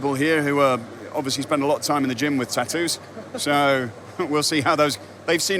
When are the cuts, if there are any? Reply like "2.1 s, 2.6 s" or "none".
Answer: none